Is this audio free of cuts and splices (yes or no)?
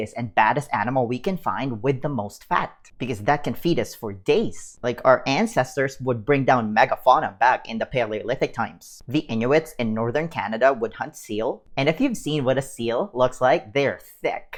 yes